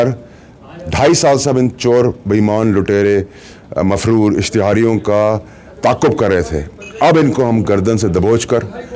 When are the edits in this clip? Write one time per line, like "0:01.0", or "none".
none